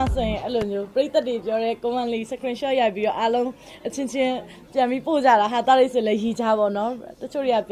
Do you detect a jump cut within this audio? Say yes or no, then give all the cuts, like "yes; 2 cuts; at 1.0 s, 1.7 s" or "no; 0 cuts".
no; 0 cuts